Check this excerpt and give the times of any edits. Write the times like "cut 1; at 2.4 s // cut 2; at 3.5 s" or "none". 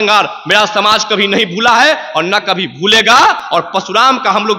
cut 1; at 3.4 s